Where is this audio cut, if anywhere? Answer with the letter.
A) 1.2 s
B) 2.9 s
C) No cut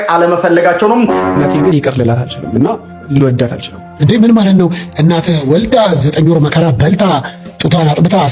A